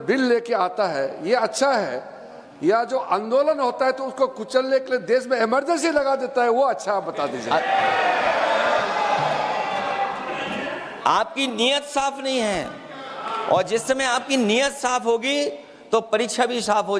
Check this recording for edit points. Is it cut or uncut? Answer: cut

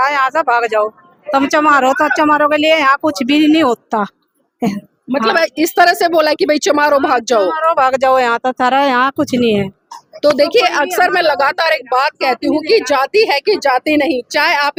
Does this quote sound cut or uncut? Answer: uncut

